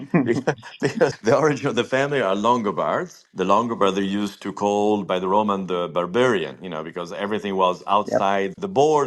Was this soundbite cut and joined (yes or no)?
yes